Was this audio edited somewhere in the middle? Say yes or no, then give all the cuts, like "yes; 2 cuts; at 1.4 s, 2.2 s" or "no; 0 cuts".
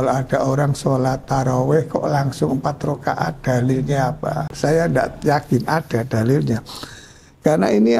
yes; 1 cut; at 4.5 s